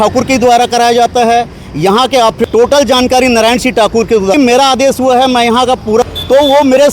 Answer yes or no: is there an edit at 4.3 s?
yes